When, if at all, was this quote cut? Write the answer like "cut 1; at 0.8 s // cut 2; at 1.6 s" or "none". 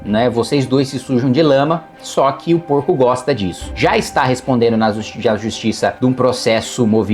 cut 1; at 3.7 s